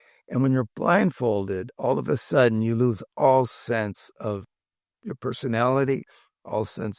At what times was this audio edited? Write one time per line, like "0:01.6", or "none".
none

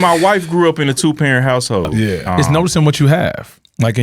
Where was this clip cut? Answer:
0:02.4

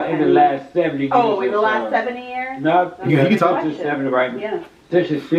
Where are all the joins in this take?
none

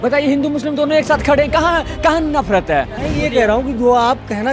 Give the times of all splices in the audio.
0:03.0

